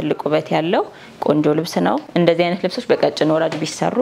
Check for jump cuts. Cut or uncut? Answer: cut